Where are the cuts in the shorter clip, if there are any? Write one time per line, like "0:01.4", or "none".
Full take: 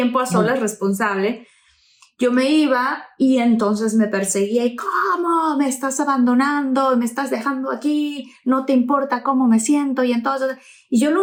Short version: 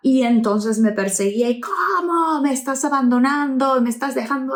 none